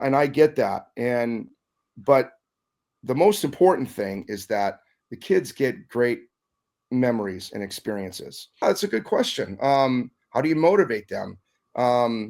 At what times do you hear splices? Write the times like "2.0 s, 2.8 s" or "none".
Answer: 8.6 s